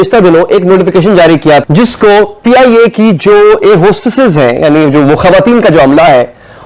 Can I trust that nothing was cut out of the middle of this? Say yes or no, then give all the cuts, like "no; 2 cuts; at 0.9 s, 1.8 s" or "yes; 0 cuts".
yes; 0 cuts